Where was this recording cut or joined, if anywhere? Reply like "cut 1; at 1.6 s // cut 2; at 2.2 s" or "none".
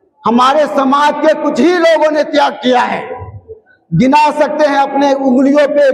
none